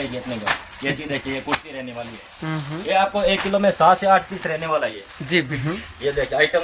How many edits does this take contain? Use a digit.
1